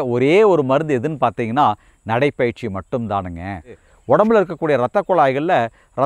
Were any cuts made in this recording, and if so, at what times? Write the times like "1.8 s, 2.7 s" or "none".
3.9 s

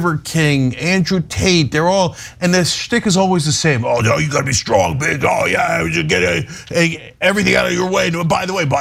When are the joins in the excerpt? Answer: none

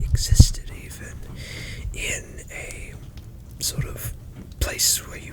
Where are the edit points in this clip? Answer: none

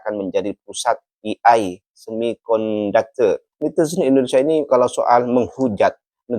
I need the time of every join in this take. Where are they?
3.5 s

